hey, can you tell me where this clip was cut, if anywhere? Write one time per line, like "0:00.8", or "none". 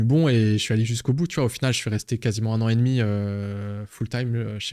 none